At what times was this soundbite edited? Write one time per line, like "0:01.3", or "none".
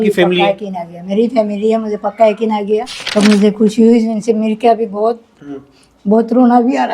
0:03.0